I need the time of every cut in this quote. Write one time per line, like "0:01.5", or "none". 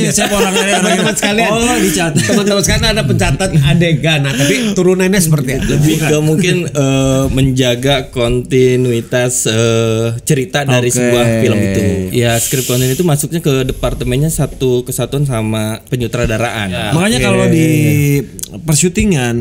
0:05.7
0:12.0
0:16.8